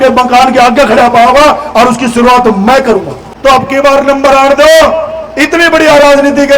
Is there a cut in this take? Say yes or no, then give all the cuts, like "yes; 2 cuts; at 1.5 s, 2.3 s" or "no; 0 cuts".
yes; 1 cut; at 3.2 s